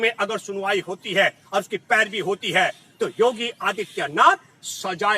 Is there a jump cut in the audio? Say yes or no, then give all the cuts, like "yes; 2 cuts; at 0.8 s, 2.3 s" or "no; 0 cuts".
no; 0 cuts